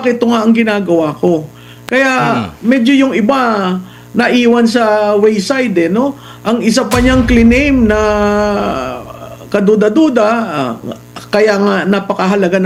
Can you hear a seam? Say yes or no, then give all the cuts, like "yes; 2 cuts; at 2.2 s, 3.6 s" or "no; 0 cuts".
no; 0 cuts